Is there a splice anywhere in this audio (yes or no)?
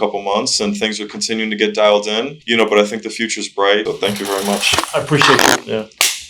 yes